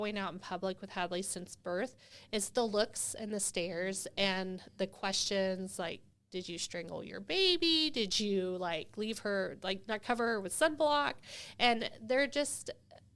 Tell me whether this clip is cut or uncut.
uncut